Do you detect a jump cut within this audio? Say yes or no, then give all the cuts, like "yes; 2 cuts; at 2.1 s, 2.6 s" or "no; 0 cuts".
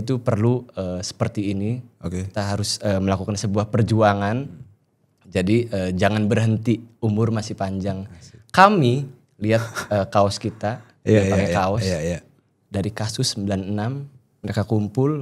no; 0 cuts